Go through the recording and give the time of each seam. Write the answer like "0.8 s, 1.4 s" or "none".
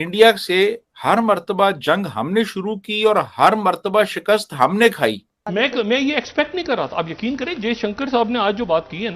5.3 s